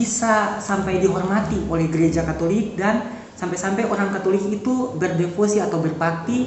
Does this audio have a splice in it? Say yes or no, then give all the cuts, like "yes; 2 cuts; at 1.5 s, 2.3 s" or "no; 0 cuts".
no; 0 cuts